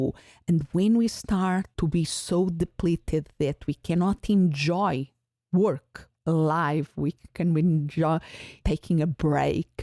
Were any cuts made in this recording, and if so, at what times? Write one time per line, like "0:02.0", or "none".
0:01.7
0:06.1